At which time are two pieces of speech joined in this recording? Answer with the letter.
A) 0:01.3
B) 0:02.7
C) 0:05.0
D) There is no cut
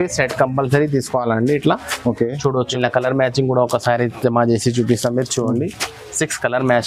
B